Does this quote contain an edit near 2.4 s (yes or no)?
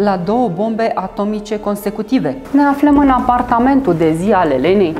yes